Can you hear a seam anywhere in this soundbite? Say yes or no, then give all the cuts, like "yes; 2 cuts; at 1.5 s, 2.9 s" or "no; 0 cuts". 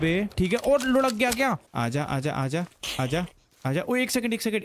yes; 1 cut; at 1.7 s